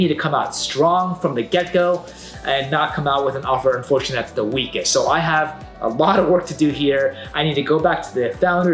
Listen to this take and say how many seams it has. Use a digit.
0